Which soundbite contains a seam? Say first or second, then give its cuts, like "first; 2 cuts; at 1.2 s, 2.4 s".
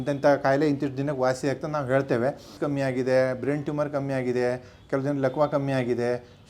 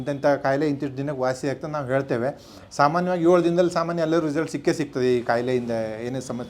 first; 1 cut; at 2.5 s